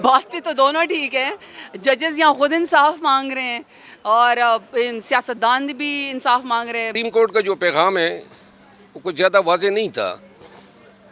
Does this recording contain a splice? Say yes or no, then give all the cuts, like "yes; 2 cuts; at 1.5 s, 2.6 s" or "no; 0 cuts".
yes; 1 cut; at 6.9 s